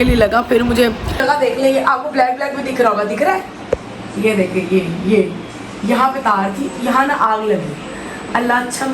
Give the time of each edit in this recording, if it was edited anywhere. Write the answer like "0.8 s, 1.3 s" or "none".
1.1 s

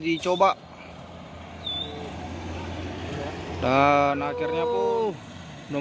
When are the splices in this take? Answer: 4.4 s

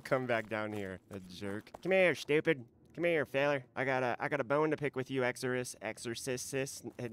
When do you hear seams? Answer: 1.7 s

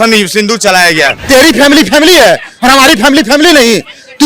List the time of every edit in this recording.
1.1 s

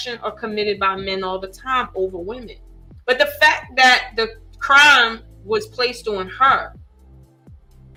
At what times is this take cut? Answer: none

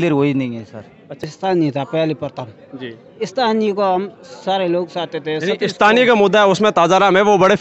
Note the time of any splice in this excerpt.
1.3 s

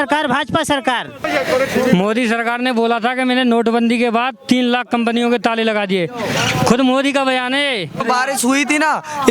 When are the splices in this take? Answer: 1.2 s, 8.0 s

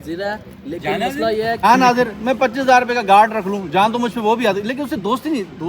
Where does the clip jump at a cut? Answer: 1.6 s

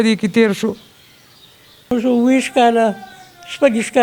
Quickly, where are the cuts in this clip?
1.9 s

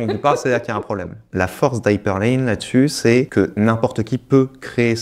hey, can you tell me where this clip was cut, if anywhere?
1.2 s, 3.3 s

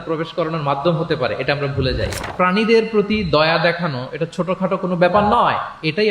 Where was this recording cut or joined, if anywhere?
2.3 s

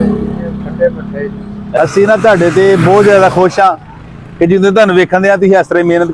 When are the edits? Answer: 1.8 s

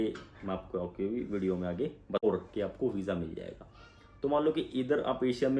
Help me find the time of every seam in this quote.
2.2 s

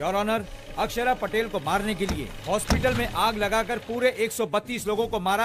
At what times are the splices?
none

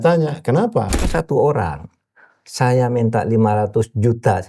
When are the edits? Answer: 1.1 s

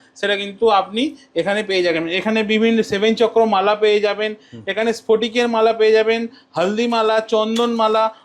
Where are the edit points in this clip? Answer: none

